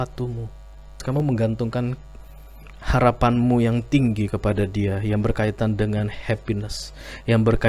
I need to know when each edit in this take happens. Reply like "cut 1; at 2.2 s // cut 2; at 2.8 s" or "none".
cut 1; at 1.0 s